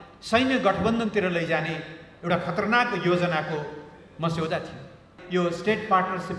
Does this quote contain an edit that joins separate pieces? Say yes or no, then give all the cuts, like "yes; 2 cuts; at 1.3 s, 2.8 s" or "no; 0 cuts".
yes; 1 cut; at 5.1 s